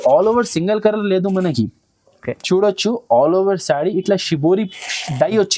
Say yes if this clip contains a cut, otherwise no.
no